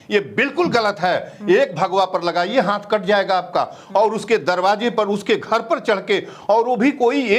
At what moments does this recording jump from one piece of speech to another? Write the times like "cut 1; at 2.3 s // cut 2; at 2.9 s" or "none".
none